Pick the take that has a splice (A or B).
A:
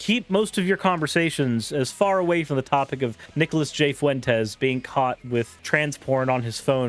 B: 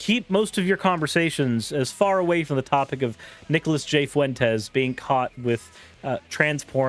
A